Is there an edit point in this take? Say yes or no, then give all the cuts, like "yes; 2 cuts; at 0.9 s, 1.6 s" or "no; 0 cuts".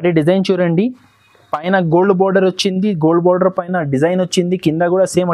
no; 0 cuts